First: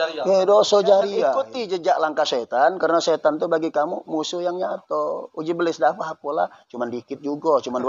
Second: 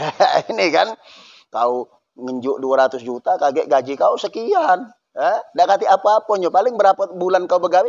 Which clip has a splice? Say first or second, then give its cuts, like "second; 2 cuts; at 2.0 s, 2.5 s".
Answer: first; 1 cut; at 1.5 s